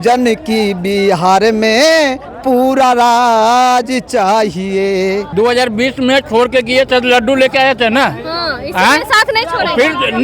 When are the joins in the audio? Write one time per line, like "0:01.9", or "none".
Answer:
0:05.3